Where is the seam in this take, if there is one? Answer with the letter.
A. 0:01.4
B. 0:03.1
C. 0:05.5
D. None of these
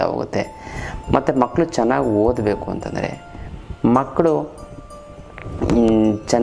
D